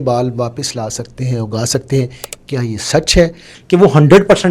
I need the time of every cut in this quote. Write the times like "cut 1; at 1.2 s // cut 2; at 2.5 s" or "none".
cut 1; at 3.5 s